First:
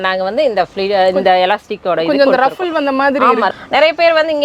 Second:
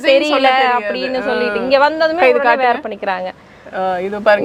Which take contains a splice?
first; 1 cut; at 3.5 s

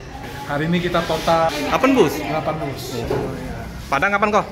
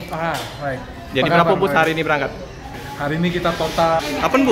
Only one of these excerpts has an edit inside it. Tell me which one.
first; 1 cut; at 3.0 s

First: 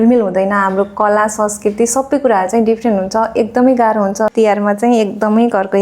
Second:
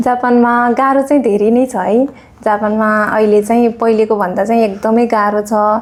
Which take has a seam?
first; 1 cut; at 4.3 s

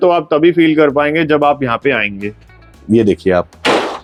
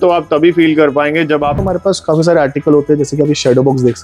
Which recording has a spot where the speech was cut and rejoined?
second; 1 cut; at 1.6 s

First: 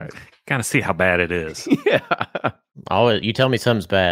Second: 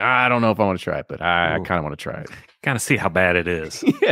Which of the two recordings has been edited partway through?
first; 1 cut; at 2.9 s

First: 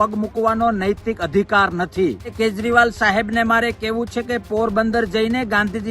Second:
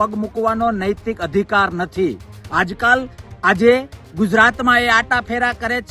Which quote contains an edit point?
first; 1 cut; at 2.3 s

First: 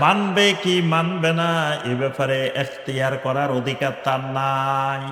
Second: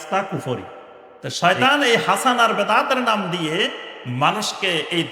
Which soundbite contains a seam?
second; 1 cut; at 1.0 s

